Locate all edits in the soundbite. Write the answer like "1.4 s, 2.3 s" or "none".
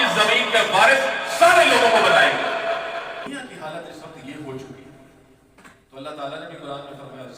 3.2 s